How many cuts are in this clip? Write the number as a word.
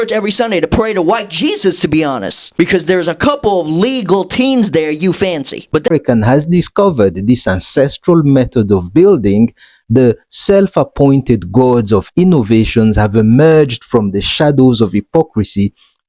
one